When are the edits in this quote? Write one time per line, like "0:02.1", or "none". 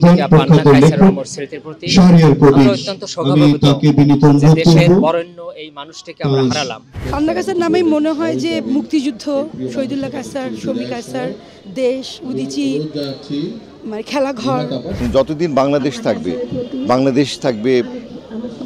0:06.9
0:15.0